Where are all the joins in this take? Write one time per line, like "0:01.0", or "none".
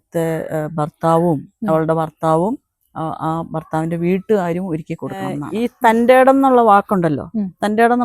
0:05.4